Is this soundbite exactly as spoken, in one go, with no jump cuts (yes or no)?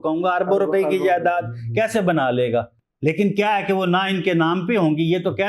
yes